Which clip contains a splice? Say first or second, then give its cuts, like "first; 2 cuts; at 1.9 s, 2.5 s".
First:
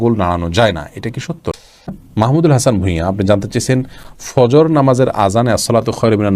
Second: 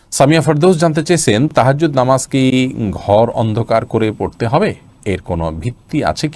first; 1 cut; at 1.5 s